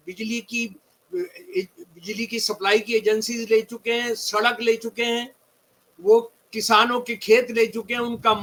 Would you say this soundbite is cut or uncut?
uncut